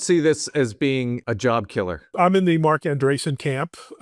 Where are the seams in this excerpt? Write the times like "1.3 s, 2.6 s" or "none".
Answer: 1.2 s, 2.1 s